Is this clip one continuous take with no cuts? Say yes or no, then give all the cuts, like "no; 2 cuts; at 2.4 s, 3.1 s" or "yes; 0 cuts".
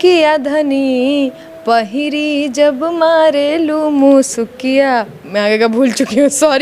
yes; 0 cuts